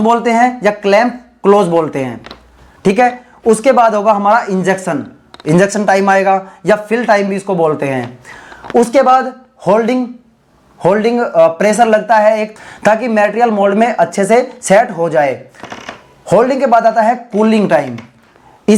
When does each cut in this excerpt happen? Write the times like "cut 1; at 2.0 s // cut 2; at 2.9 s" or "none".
none